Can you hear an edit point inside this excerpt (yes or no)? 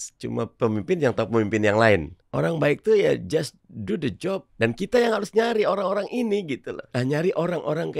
yes